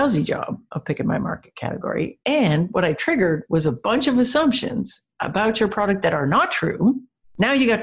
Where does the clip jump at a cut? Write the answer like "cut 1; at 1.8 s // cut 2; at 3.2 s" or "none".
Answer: none